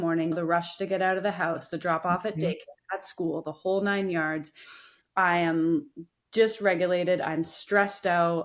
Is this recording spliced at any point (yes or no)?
no